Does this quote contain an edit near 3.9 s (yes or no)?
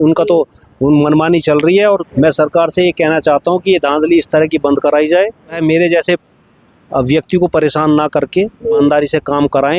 no